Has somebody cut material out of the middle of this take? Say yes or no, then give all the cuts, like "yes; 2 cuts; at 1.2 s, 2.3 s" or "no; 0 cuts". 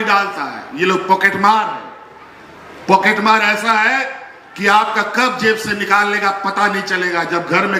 no; 0 cuts